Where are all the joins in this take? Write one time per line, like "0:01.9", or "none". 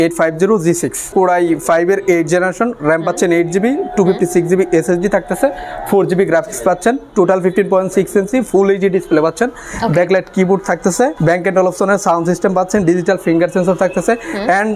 0:01.1
0:11.2